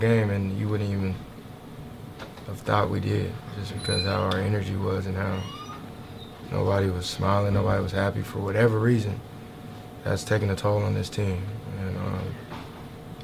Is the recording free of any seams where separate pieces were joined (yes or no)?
yes